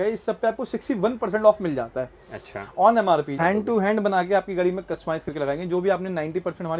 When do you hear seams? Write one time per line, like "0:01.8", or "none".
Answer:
0:03.3